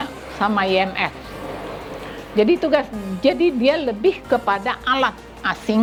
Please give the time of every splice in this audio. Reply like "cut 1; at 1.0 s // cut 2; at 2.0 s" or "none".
none